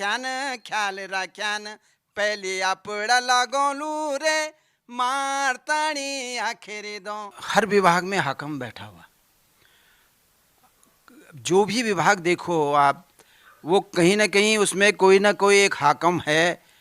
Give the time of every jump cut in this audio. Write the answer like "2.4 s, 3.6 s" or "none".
7.3 s